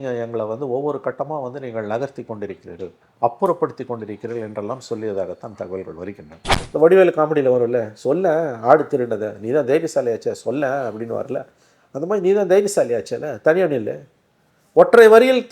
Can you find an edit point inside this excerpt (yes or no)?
yes